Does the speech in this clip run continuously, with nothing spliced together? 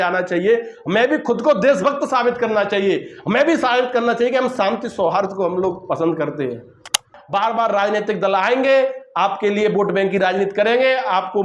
no; 1 cut; at 7.2 s

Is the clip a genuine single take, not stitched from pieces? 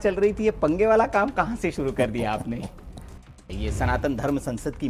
no; 1 cut; at 3.5 s

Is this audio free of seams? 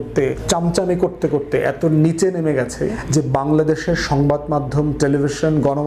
yes; 0 cuts

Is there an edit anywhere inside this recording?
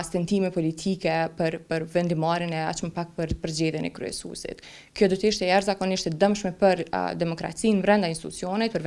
no; 0 cuts

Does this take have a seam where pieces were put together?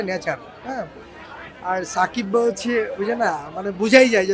no; 0 cuts

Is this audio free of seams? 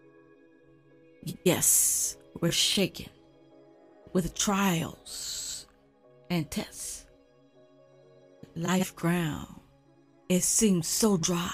no; 1 cut; at 1.1 s

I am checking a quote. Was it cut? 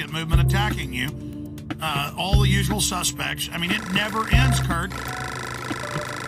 no; 0 cuts

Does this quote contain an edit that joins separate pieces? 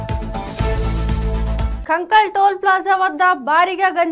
yes; 1 cut; at 1.7 s

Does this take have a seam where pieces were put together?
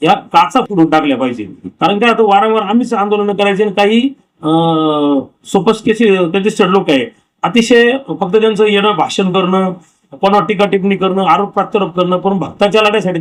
no; 0 cuts

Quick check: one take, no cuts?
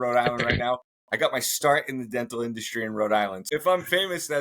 yes; 0 cuts

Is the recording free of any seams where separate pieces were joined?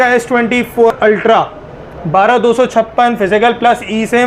no; 1 cut; at 0.9 s

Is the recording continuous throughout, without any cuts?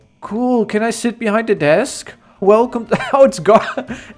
no; 1 cut; at 2.4 s

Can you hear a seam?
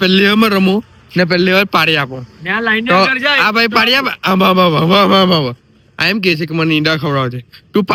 no; 0 cuts

